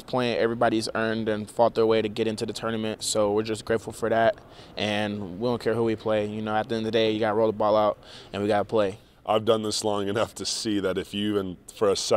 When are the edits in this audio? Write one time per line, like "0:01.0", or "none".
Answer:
0:09.1